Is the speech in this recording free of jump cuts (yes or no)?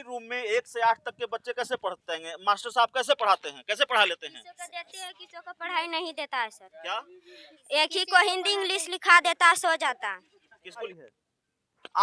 no